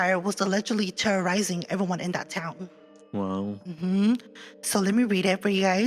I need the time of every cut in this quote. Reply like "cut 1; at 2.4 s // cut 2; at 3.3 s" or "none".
none